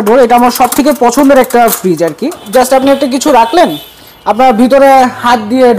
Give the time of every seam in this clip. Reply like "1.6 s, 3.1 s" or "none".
2.4 s